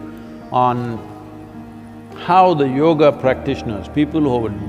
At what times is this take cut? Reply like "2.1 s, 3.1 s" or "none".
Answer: none